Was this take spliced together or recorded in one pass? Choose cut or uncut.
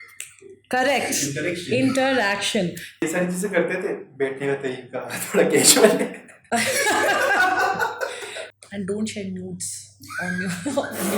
cut